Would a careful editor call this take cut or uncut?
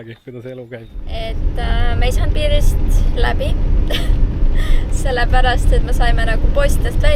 cut